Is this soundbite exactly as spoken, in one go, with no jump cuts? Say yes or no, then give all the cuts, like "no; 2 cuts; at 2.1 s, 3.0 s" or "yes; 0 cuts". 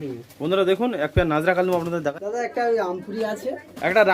no; 1 cut; at 2.1 s